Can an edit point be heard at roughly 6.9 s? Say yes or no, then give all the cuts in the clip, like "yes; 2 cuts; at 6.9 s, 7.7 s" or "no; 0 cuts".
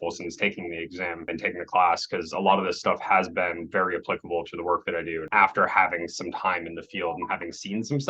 no; 2 cuts; at 1.3 s, 5.3 s